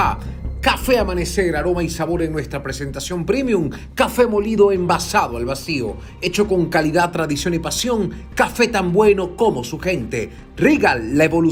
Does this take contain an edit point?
no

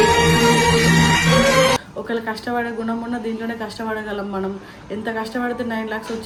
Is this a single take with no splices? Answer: yes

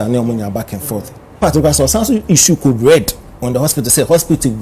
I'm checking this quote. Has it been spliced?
yes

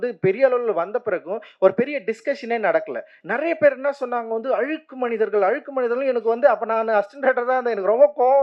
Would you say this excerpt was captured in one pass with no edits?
no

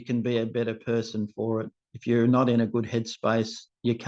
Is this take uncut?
yes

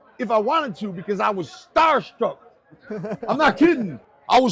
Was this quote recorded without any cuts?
yes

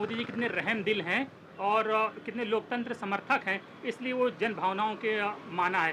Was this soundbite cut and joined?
no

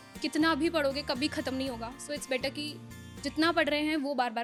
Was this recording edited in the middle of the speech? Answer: no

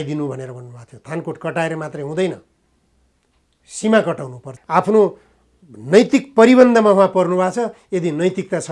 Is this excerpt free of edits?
no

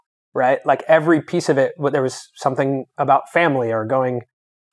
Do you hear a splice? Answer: no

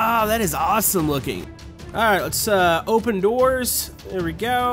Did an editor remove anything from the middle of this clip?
yes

